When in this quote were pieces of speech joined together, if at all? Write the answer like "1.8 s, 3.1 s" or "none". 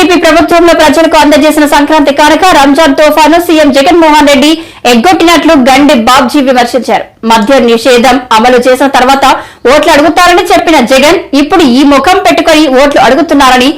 none